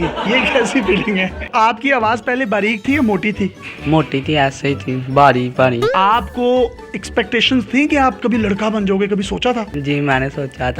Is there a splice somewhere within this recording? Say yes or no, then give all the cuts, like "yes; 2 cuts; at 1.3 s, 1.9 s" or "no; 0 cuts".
yes; 2 cuts; at 1.4 s, 5.8 s